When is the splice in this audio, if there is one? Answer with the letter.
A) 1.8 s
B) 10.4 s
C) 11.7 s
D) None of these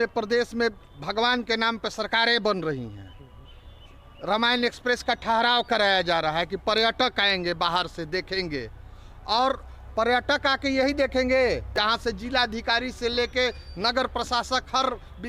C